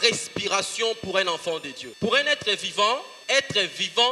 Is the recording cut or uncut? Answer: cut